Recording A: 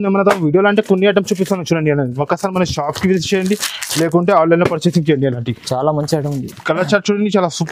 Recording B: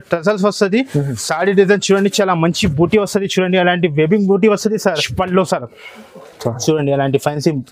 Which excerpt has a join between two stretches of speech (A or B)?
B